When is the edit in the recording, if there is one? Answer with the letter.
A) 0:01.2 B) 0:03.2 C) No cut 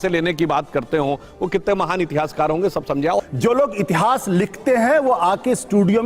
B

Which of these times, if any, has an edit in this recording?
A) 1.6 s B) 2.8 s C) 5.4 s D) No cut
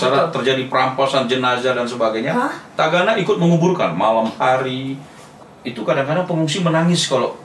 C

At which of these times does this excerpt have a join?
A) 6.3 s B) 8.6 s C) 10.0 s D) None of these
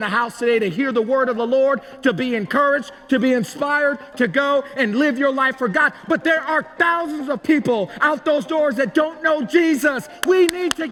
D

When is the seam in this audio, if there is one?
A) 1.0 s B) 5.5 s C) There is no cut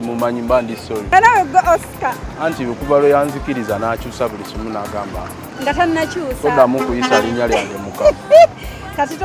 A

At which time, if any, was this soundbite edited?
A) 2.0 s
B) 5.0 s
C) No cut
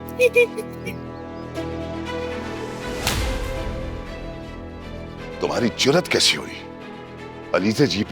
C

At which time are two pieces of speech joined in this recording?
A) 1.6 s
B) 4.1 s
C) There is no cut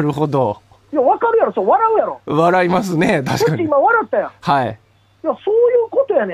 A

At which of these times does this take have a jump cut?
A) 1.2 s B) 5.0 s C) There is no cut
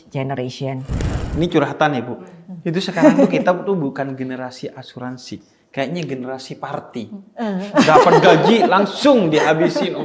A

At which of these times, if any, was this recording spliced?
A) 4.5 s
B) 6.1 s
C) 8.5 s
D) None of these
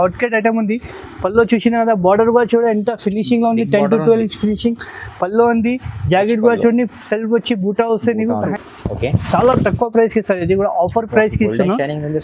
C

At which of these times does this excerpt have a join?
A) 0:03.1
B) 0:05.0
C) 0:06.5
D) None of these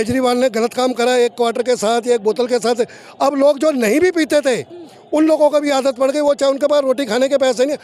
D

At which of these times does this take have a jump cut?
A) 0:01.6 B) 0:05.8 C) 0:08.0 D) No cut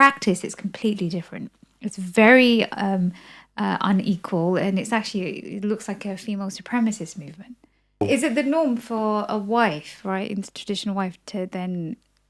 C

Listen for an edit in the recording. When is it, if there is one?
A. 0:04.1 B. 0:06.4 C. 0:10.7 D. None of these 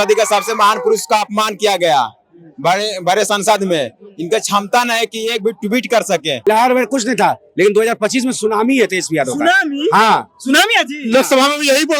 B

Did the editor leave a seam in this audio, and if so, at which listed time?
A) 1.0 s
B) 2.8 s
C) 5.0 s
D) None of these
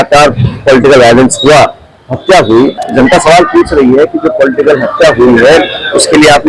B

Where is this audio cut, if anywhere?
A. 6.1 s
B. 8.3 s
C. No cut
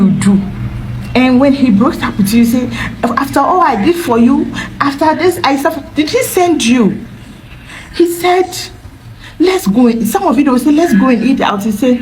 C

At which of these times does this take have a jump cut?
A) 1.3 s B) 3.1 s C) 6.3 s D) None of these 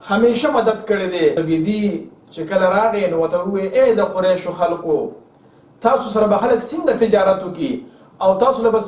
A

